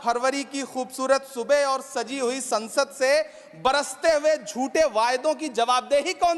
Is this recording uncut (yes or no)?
yes